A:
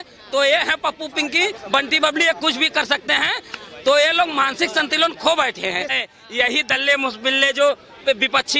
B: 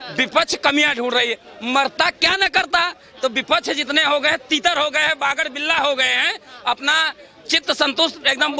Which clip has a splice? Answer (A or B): A